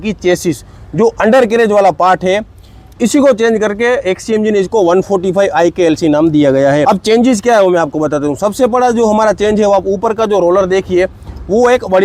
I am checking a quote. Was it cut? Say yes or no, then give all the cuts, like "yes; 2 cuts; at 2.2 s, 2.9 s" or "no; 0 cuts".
no; 0 cuts